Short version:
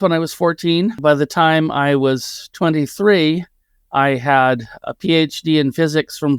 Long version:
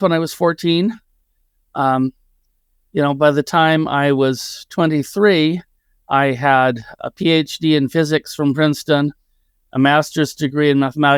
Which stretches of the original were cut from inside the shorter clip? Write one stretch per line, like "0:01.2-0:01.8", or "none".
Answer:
0:01.0-0:03.2